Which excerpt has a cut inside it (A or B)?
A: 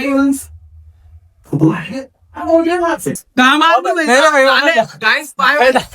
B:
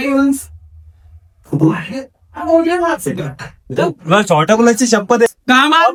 A